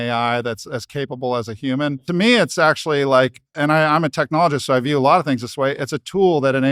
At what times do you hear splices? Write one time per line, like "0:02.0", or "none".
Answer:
0:02.0
0:03.6